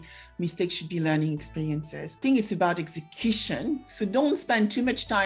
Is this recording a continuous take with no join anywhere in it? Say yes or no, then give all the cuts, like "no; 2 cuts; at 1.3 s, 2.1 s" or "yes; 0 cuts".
no; 1 cut; at 2.2 s